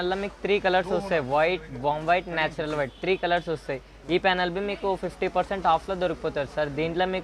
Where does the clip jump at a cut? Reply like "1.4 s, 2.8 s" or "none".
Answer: none